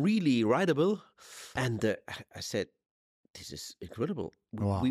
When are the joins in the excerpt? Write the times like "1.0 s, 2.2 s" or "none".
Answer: 1.5 s